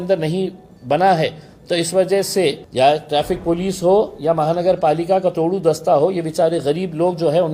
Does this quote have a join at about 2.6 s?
yes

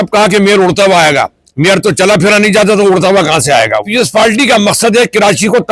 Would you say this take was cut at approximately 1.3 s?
no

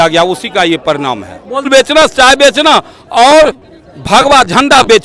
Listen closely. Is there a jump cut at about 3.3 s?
no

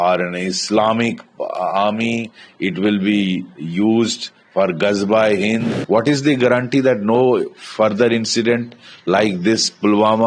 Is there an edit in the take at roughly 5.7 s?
yes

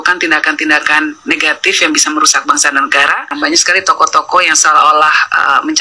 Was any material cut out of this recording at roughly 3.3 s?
yes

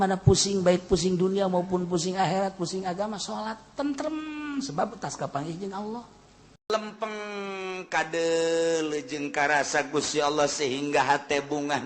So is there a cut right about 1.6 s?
no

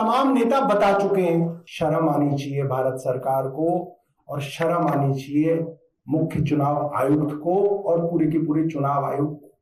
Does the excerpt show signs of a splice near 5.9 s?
no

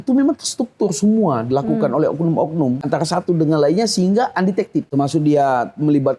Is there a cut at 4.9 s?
yes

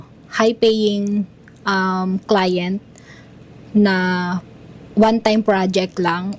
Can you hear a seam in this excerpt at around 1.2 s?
no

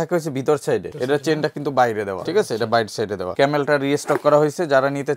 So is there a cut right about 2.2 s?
yes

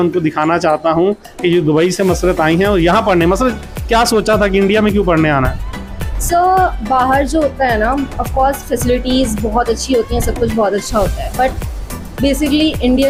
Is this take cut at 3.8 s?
no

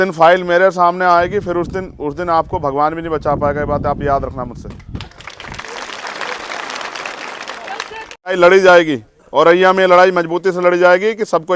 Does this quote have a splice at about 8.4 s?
yes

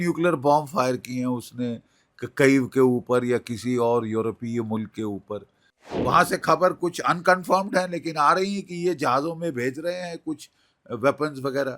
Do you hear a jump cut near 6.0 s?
yes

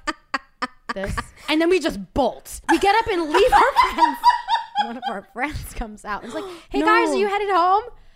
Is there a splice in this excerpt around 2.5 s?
yes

